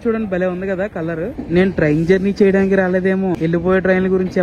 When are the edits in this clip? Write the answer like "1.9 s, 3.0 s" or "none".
1.4 s